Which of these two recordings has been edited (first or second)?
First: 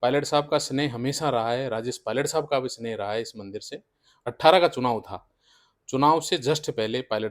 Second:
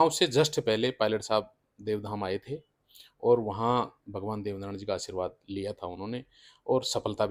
first